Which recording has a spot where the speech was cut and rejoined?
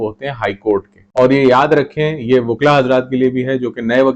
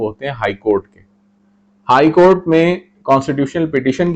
first; 1 cut; at 1.0 s

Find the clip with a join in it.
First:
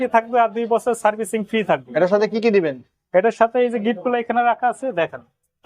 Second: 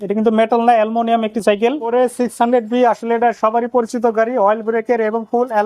second; 1 cut; at 1.9 s

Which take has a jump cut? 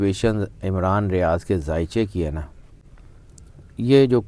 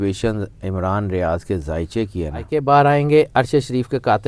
second; 1 cut; at 2.4 s

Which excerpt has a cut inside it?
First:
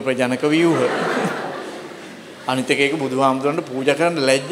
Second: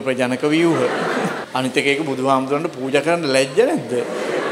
second; 1 cut; at 1.4 s

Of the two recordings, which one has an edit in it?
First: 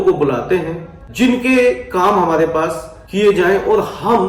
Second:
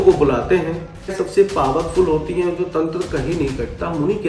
second; 1 cut; at 1.1 s

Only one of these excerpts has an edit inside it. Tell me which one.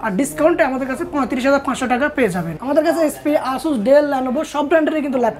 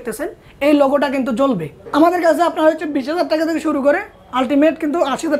second; 1 cut; at 1.8 s

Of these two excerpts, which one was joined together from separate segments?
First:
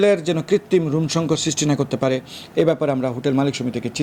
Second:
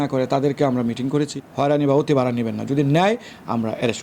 second; 1 cut; at 1.4 s

